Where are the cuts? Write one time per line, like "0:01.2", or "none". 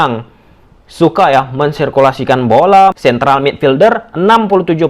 0:03.0